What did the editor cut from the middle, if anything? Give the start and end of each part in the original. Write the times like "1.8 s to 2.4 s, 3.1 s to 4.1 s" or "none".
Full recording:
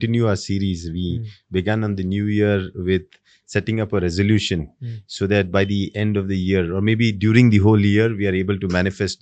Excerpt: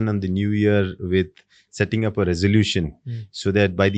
none